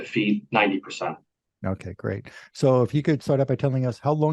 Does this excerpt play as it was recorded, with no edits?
yes; 0 cuts

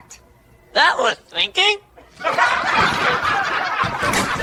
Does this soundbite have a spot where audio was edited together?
no; 0 cuts

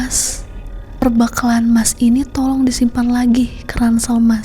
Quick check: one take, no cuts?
no; 1 cut; at 1.0 s

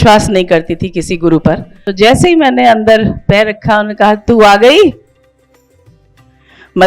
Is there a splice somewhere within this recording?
yes; 1 cut; at 1.8 s

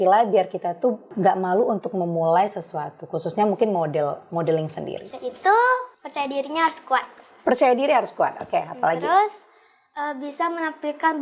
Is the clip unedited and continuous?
no; 3 cuts; at 1.1 s, 5.0 s, 6.0 s

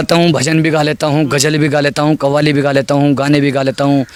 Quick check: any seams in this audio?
no; 0 cuts

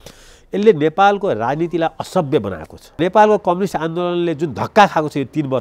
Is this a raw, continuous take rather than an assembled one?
no; 1 cut; at 3.0 s

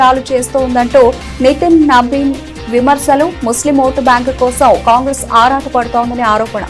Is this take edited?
no; 0 cuts

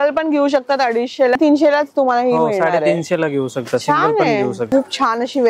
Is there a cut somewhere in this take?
yes; 2 cuts; at 1.4 s, 4.6 s

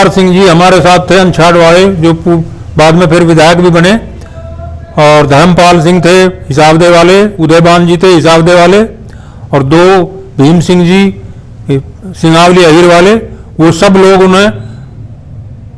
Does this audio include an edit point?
no; 0 cuts

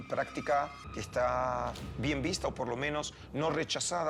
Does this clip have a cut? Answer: no; 0 cuts

